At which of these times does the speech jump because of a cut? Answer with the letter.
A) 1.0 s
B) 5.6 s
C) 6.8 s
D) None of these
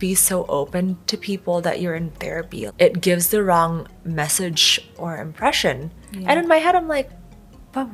D